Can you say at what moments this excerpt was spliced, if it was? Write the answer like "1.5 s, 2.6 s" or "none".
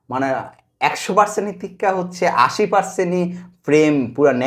none